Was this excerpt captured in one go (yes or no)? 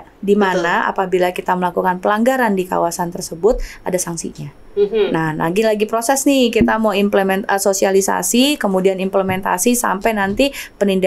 yes